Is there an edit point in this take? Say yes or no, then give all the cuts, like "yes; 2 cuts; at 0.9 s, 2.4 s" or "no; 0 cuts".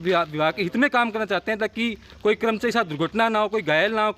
no; 0 cuts